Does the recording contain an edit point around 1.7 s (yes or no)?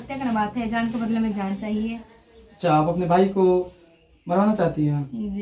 no